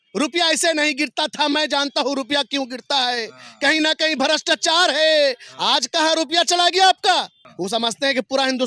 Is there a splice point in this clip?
yes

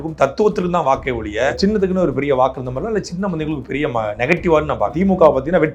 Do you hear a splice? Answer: yes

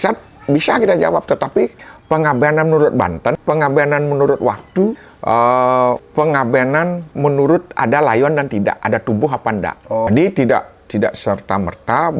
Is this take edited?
yes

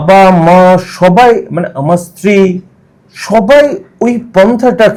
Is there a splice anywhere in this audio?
no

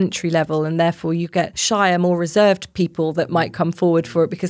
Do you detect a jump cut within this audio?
yes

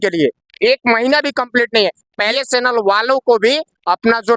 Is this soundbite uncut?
no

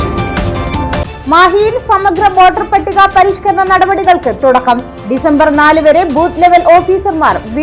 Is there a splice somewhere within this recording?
yes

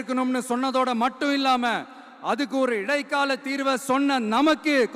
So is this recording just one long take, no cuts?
yes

